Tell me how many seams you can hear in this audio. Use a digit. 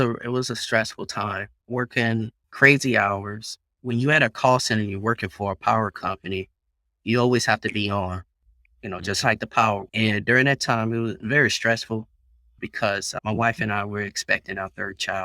5